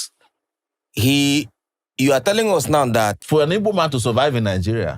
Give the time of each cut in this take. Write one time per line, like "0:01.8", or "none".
0:03.2

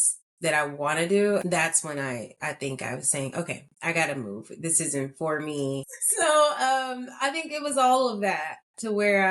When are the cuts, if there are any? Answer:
0:01.4
0:06.0

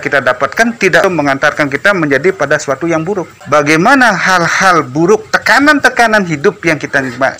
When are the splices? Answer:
0:01.0
0:03.3

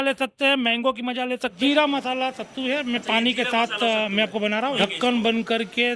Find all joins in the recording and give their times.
0:01.6
0:04.8

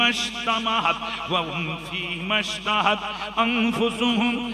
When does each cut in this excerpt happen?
none

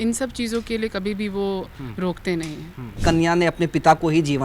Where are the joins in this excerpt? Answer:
0:03.0

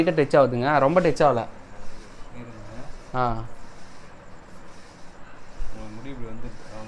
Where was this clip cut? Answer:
none

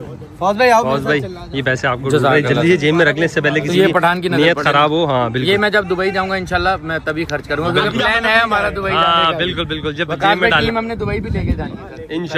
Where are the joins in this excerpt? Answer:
none

